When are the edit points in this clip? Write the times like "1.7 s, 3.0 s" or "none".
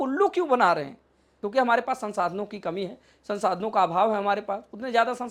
1.4 s